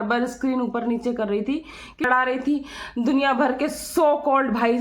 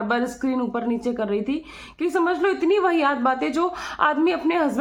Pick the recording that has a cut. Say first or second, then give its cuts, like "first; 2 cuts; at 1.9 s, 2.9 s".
first; 1 cut; at 2.0 s